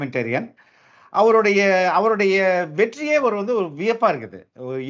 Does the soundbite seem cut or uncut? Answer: uncut